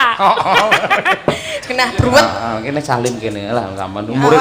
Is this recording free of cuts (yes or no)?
no